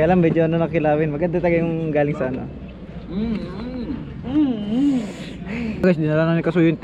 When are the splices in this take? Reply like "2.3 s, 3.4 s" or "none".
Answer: 5.8 s